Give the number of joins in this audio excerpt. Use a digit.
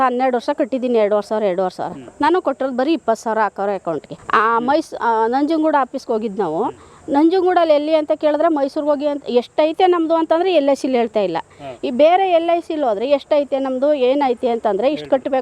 1